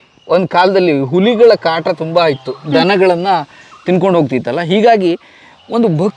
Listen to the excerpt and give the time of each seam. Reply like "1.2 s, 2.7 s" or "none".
none